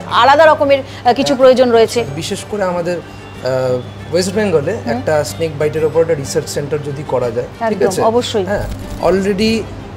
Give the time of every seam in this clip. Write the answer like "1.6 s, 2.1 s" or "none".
2.1 s, 8.9 s